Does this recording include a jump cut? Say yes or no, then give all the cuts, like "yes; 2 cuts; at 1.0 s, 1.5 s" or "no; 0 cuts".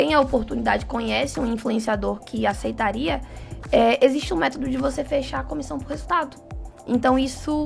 no; 0 cuts